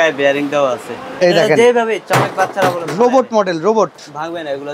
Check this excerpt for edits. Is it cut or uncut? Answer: cut